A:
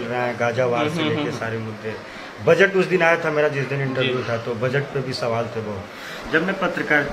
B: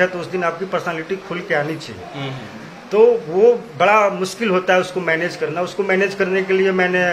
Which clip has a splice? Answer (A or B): A